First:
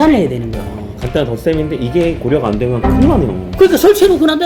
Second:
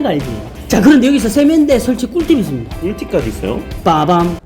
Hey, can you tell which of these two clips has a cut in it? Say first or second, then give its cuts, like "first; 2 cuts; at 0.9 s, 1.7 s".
second; 2 cuts; at 0.8 s, 2.7 s